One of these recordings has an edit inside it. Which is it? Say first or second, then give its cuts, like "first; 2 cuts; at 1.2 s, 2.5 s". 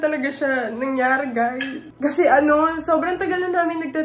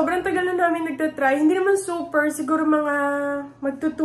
first; 1 cut; at 1.8 s